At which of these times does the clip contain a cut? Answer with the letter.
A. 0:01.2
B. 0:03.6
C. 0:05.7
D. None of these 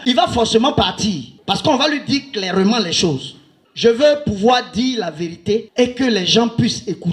B